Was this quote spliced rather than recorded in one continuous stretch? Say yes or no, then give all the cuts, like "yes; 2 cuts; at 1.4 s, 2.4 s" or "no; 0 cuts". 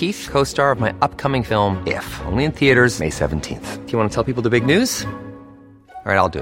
no; 0 cuts